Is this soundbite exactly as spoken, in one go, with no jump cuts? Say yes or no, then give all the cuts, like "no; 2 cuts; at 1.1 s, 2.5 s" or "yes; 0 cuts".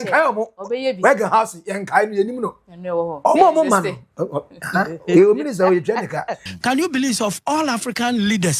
no; 1 cut; at 6.4 s